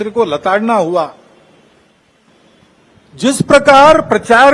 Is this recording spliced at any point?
no; 0 cuts

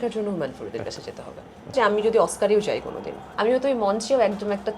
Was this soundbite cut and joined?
yes; 2 cuts; at 1.7 s, 3.2 s

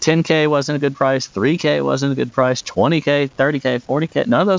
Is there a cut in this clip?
no; 0 cuts

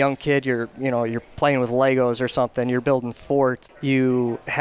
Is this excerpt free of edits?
no; 1 cut; at 3.7 s

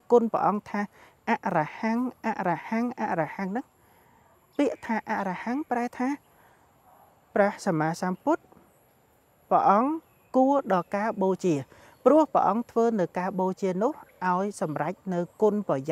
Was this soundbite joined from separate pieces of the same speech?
no; 0 cuts

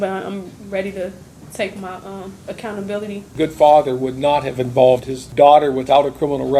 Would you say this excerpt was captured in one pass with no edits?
no; 3 cuts; at 2.4 s, 3.3 s, 5.2 s

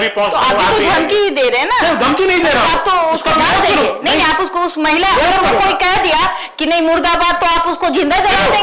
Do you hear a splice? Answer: no; 0 cuts

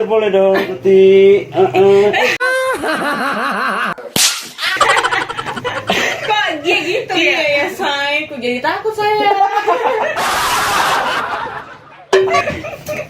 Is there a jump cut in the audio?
no; 0 cuts

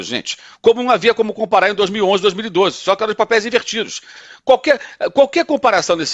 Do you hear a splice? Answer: no; 0 cuts

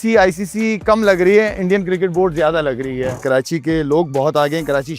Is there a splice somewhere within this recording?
yes; 1 cut; at 3.2 s

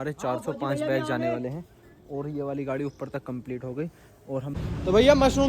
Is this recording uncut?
no; 1 cut; at 4.5 s

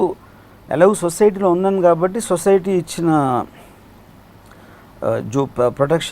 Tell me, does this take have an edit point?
no; 0 cuts

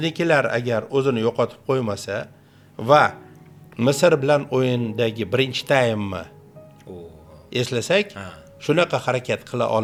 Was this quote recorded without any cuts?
yes; 0 cuts

